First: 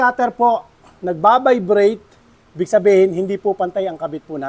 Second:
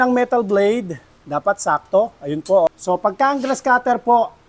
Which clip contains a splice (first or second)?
second